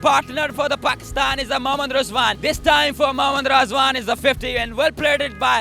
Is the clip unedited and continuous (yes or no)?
no